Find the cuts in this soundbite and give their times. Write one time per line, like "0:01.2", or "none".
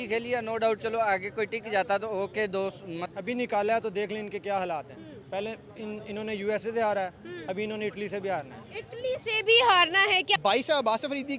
0:03.1
0:10.4